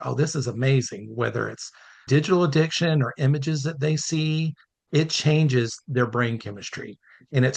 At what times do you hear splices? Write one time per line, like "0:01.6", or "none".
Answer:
0:01.9
0:04.8